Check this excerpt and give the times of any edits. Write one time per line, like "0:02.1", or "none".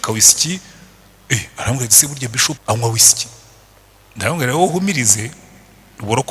0:02.6